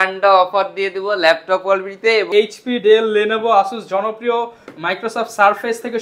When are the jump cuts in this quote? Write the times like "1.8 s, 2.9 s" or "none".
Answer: 2.3 s